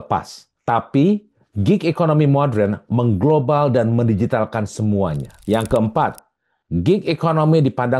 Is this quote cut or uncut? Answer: cut